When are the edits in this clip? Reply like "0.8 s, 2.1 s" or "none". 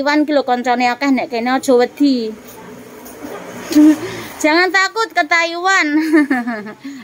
none

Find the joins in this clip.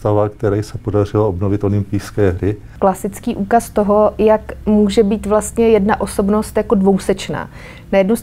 2.7 s

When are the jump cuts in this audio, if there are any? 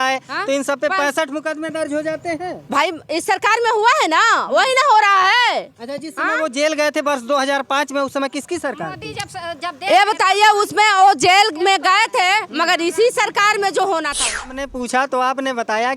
14.7 s

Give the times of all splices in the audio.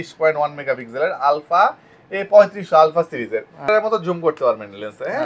3.7 s

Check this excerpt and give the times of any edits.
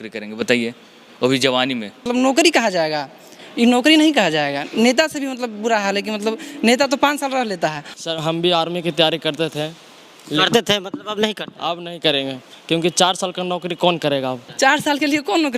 2.1 s, 7.9 s, 14.5 s

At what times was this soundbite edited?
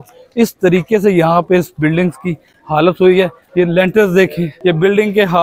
3.4 s, 4.5 s

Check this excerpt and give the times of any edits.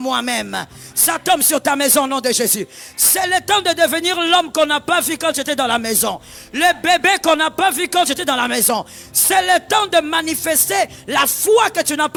none

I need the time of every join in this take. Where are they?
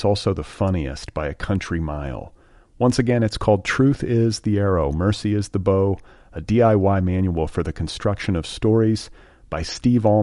none

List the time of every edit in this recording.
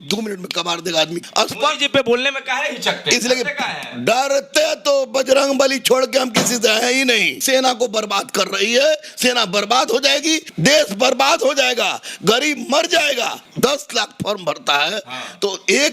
1.2 s, 7.4 s, 10.5 s, 13.4 s

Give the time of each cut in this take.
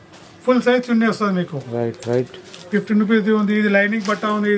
none

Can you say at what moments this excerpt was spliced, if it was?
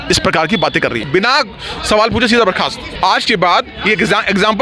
1.0 s, 2.8 s

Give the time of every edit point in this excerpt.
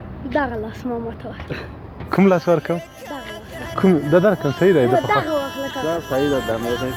none

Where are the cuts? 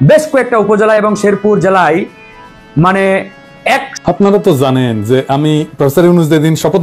4.0 s

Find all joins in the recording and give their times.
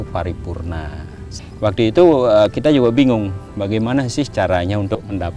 1.4 s

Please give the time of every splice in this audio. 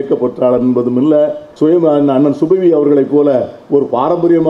1.4 s

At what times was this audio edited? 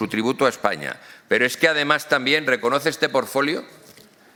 none

